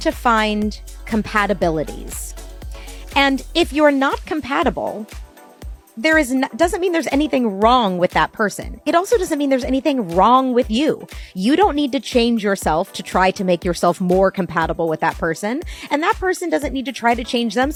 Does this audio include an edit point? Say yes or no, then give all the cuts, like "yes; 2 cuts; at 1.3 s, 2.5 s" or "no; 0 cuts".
no; 0 cuts